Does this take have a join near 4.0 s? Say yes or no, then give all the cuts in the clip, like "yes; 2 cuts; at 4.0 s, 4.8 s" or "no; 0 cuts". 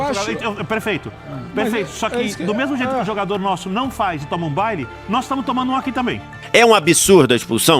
no; 1 cut; at 6.3 s